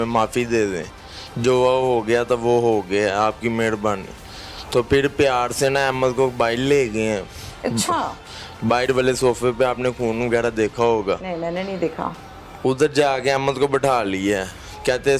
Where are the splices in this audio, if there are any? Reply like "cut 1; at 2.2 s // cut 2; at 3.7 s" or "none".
none